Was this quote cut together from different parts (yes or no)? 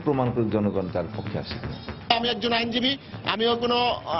yes